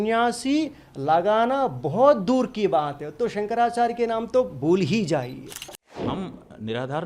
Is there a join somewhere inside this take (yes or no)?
yes